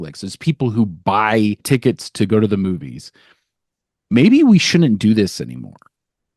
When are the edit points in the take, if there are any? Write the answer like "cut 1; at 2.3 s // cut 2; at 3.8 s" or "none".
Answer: cut 1; at 1.6 s